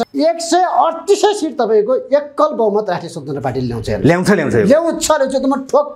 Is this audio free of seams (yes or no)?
yes